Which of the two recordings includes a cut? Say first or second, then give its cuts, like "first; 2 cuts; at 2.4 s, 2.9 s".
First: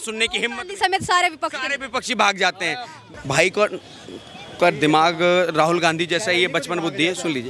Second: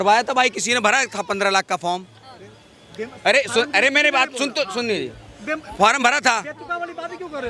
first; 1 cut; at 3.0 s